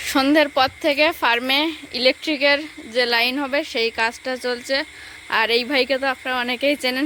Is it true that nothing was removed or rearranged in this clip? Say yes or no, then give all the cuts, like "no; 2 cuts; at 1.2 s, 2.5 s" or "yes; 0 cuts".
yes; 0 cuts